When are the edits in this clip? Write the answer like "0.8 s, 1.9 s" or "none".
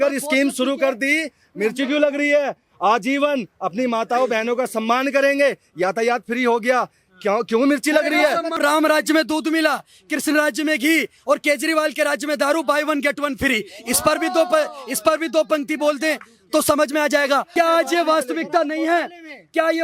8.6 s, 17.5 s